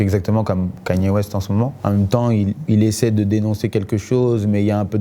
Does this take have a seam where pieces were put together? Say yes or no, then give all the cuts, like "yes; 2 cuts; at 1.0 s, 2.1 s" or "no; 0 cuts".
yes; 1 cut; at 1.8 s